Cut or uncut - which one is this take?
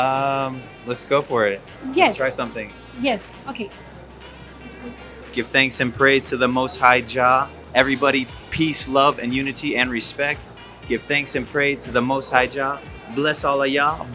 uncut